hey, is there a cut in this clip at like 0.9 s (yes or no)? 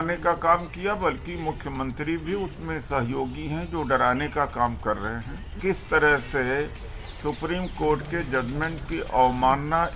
no